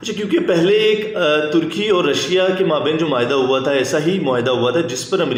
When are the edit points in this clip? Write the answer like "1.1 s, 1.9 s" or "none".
none

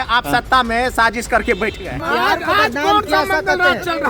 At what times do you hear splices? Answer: 2.0 s

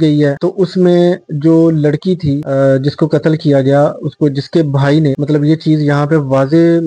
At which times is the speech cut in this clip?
none

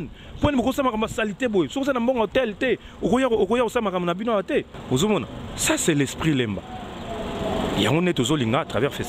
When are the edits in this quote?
4.7 s

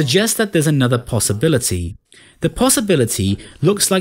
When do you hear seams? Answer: none

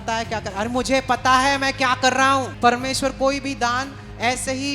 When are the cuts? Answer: 2.5 s

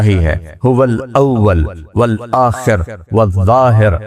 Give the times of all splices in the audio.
none

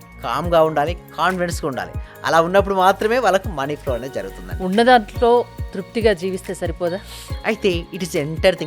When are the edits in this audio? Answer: none

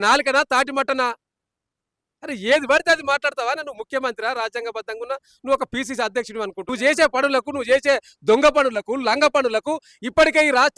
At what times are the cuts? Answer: 6.6 s

